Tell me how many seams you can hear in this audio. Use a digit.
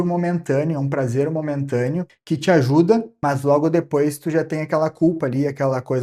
2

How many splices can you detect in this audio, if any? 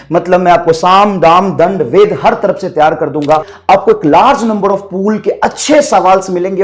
1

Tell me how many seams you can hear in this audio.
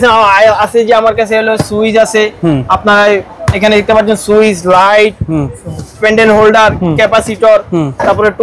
0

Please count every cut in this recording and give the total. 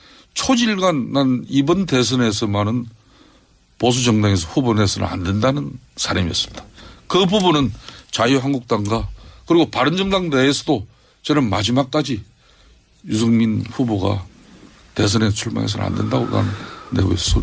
1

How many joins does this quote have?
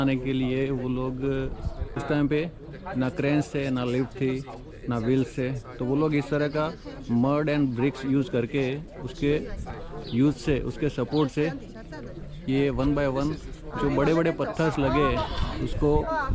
0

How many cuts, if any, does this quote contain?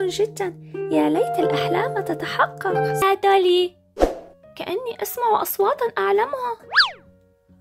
1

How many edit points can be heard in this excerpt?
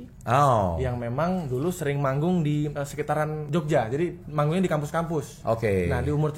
2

